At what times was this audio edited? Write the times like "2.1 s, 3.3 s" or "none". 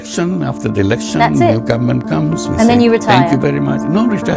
none